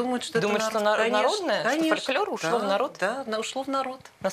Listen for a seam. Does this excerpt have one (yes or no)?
no